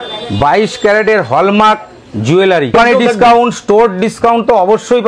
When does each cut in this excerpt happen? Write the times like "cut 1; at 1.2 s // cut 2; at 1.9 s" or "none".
cut 1; at 2.7 s